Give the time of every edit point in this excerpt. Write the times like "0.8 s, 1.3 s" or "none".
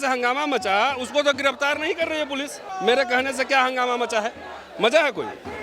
2.6 s